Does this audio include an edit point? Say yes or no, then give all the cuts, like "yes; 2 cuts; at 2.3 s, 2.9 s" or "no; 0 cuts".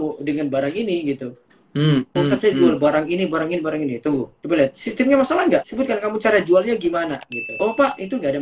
no; 0 cuts